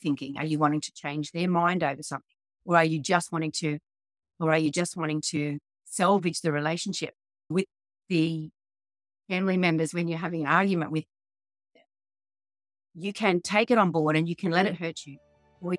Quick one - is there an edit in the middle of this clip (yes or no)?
no